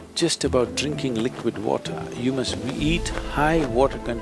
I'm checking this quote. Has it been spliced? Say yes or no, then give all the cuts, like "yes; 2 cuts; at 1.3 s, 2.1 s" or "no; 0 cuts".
no; 0 cuts